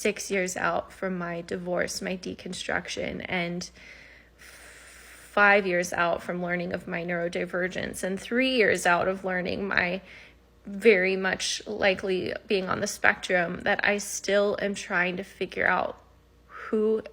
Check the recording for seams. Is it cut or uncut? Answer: uncut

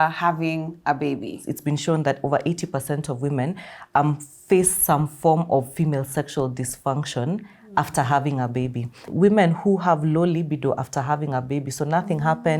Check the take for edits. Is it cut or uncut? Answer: cut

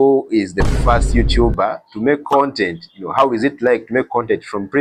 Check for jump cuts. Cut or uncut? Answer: uncut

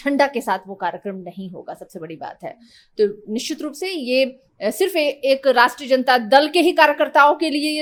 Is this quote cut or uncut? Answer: uncut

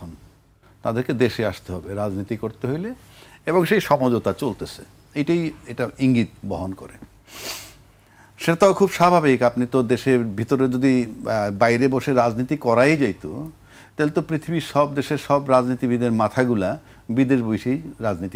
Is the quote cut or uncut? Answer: uncut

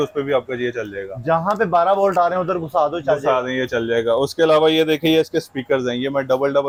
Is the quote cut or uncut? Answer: uncut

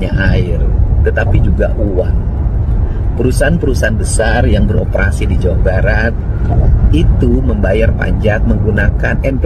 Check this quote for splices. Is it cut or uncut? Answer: uncut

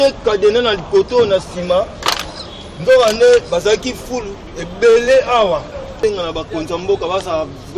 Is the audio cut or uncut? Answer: cut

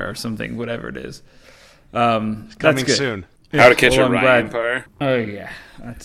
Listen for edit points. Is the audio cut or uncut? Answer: cut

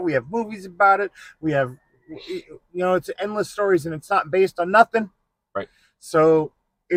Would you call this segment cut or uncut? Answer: uncut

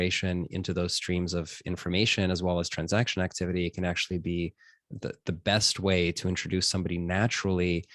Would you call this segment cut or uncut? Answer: uncut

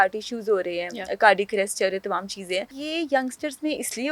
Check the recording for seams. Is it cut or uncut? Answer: cut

